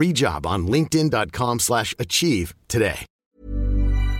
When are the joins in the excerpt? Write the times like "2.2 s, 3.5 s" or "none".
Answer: 3.1 s

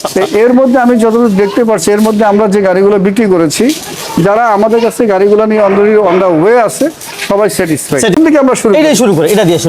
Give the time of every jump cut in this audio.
8.2 s

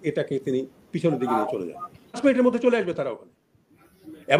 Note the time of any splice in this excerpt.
2.2 s

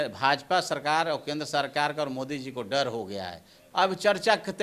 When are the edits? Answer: 3.6 s

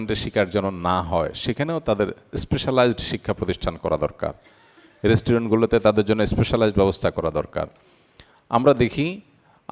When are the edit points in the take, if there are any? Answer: none

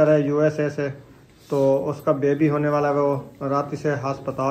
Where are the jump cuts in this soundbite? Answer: none

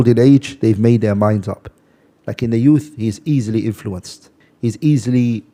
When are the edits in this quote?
none

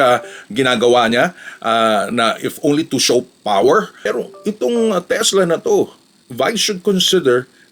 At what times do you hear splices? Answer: 3.9 s

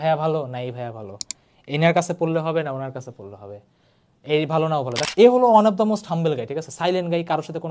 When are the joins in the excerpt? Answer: 5.1 s

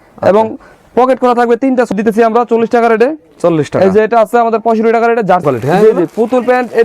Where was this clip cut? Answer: 1.9 s, 5.4 s

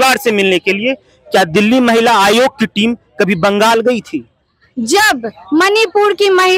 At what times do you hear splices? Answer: none

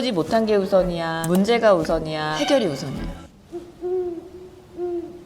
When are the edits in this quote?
1.1 s, 2.3 s

